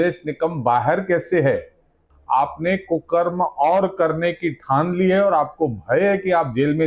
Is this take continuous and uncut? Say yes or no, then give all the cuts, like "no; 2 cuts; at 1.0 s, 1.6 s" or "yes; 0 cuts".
no; 1 cut; at 2.0 s